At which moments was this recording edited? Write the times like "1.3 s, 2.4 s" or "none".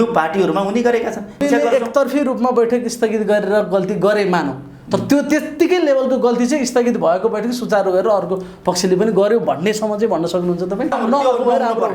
1.4 s, 10.9 s